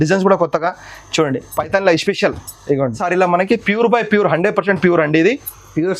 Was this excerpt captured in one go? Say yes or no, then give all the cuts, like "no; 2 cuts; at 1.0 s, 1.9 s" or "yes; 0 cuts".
no; 1 cut; at 3.0 s